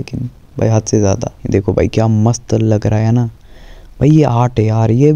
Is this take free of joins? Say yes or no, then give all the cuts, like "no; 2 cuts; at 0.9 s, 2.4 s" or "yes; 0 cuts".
no; 1 cut; at 1.4 s